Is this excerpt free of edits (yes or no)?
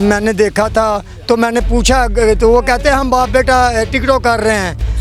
yes